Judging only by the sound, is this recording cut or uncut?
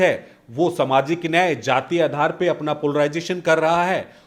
uncut